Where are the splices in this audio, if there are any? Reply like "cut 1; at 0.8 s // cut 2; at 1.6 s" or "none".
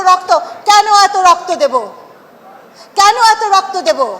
none